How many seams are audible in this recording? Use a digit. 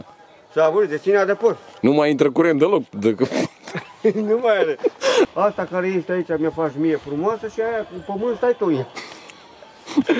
1